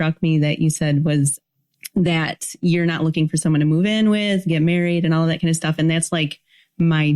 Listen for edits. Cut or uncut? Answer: uncut